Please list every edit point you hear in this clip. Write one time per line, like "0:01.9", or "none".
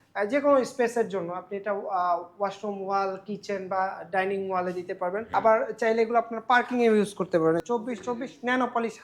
0:05.3
0:07.6

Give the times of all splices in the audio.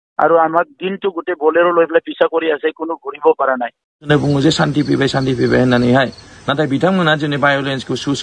0:04.0

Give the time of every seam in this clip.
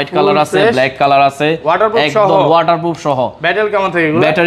none

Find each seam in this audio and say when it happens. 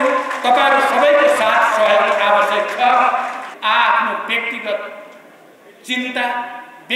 0:03.4

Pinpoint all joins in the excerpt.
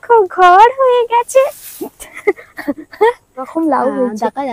0:03.5

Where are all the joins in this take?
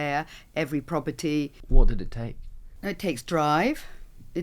0:01.6

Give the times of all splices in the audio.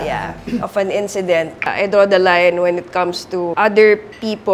0:01.7
0:03.5

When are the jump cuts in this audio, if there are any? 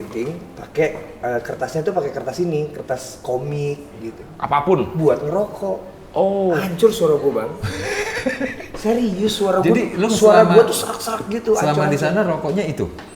none

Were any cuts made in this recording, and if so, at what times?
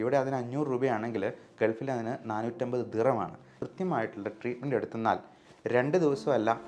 0:03.5

